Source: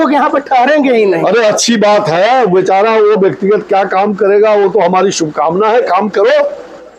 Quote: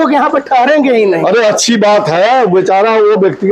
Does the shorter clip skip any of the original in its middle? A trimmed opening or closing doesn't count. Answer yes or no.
no